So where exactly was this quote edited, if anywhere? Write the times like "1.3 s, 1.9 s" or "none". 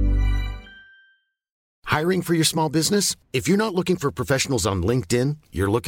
1.7 s